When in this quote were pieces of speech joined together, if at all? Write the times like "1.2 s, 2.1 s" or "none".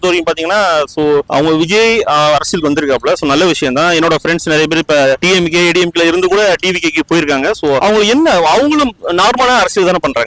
none